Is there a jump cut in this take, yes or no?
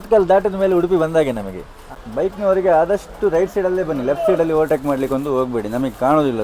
yes